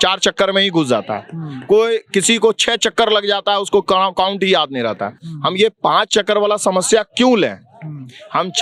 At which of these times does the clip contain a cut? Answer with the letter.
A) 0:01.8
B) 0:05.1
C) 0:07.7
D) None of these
D